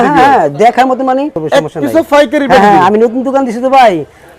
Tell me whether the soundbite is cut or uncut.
cut